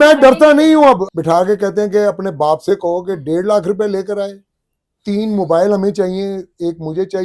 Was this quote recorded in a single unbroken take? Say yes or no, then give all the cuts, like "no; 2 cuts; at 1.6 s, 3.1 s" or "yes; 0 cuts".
no; 1 cut; at 1.0 s